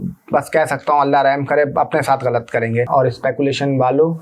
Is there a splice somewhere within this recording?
yes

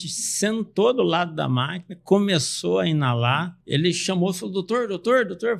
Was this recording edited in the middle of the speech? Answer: yes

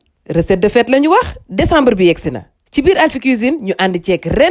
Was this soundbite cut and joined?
no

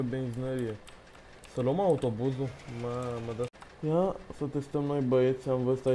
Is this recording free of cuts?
no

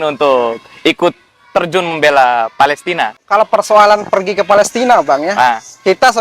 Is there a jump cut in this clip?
yes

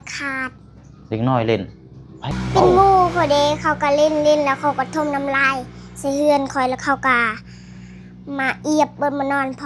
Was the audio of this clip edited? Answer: yes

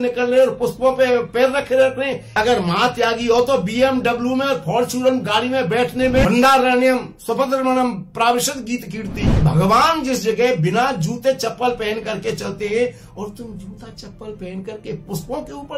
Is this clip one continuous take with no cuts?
no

